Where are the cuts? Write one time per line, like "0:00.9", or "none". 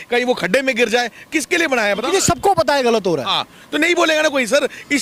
none